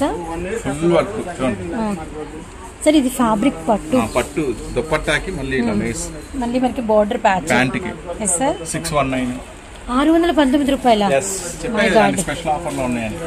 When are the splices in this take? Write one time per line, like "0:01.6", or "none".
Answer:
none